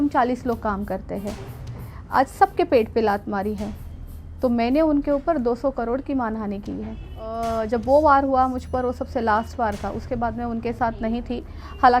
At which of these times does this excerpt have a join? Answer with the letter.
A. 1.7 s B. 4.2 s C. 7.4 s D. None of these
C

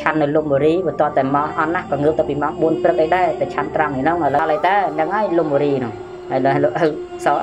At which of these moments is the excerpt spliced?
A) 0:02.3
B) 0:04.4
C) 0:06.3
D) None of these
B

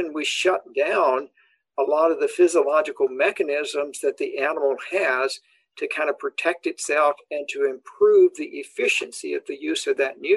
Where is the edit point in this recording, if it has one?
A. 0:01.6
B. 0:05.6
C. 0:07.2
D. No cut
D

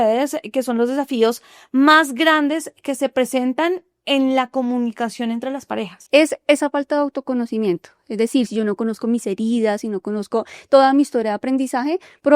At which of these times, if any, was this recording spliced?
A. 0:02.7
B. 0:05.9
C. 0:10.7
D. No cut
B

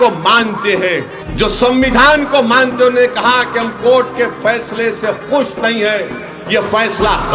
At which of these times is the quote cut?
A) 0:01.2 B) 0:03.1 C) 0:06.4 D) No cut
A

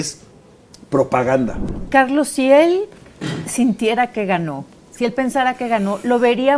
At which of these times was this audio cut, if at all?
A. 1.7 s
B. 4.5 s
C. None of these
A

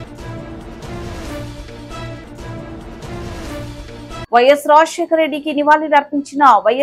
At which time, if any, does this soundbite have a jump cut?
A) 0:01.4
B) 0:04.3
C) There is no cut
B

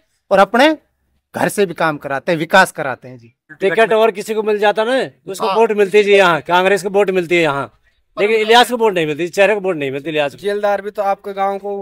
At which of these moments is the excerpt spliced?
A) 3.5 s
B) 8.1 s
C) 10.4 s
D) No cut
A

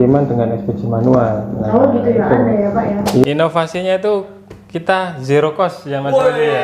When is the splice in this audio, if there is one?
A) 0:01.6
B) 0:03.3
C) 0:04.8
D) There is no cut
B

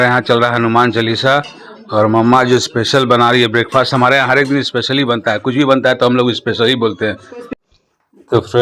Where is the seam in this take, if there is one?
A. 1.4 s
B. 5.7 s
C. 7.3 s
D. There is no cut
C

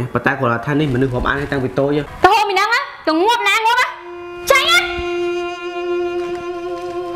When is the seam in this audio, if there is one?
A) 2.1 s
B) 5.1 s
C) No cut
A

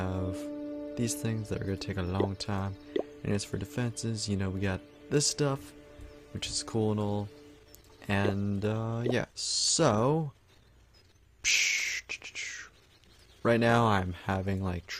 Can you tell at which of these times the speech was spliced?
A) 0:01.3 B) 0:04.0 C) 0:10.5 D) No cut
B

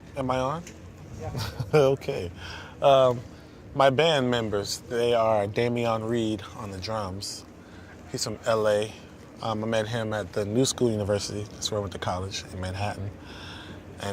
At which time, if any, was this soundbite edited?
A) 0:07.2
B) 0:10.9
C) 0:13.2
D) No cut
A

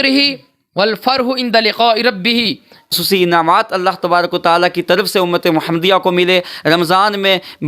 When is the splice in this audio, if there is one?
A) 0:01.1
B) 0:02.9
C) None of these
B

